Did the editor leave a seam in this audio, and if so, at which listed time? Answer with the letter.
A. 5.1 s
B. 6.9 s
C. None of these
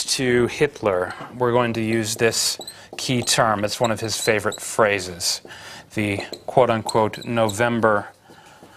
C